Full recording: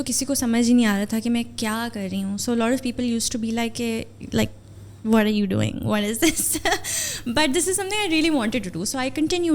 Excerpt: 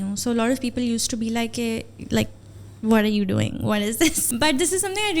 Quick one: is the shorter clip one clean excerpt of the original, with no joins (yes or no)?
no